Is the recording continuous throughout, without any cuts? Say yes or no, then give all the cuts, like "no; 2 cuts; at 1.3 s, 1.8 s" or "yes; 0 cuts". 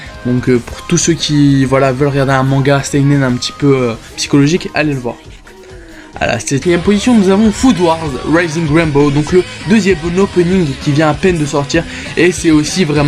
yes; 0 cuts